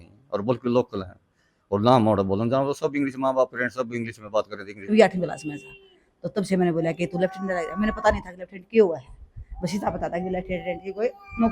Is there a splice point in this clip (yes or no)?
yes